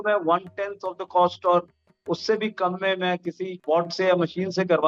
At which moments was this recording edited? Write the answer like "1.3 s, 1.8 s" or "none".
3.5 s